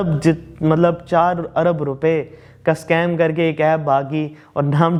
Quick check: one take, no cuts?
yes; 0 cuts

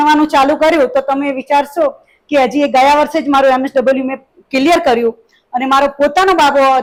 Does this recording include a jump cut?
no; 0 cuts

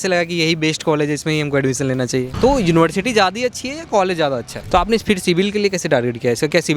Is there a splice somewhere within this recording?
yes; 2 cuts; at 2.3 s, 4.6 s

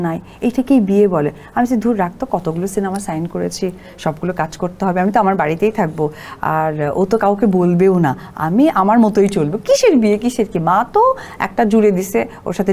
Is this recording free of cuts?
yes; 0 cuts

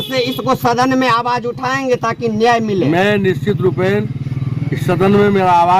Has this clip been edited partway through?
no; 0 cuts

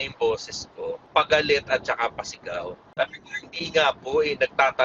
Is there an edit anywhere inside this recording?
yes; 2 cuts; at 1.0 s, 2.9 s

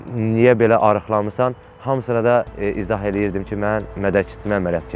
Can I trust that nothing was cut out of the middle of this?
yes; 0 cuts

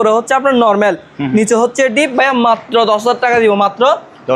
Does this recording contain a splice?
no; 0 cuts

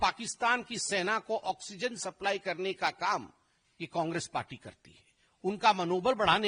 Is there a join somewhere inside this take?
no; 0 cuts

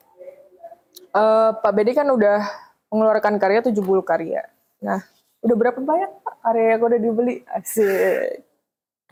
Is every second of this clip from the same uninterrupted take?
yes; 0 cuts

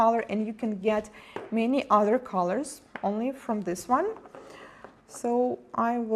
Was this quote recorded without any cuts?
no; 1 cut; at 4.3 s

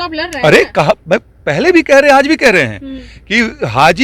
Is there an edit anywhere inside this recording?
no; 0 cuts

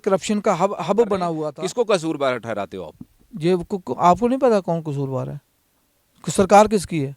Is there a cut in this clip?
yes; 1 cut; at 1.4 s

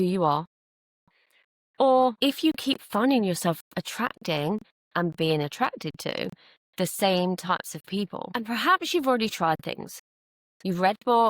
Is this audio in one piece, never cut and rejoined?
no; 1 cut; at 2.2 s

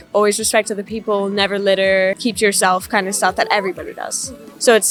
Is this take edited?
no; 0 cuts

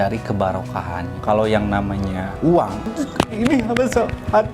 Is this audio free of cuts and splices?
no; 2 cuts; at 1.1 s, 2.8 s

